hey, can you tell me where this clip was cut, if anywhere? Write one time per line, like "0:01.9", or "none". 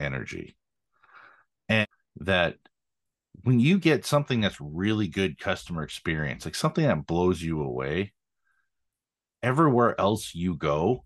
0:01.8